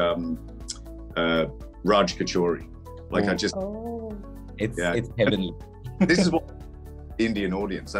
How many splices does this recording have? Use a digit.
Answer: 0